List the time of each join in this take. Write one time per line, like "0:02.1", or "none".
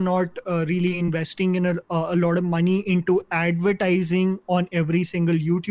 none